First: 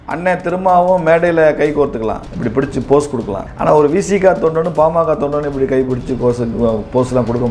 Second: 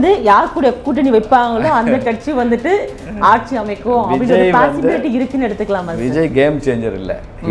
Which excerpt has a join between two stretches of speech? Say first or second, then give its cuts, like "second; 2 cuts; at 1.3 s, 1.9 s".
first; 2 cuts; at 2.3 s, 3.4 s